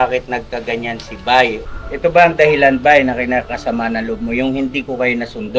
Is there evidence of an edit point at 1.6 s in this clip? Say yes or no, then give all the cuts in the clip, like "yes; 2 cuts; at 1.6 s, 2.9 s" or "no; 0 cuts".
yes; 1 cut; at 1.6 s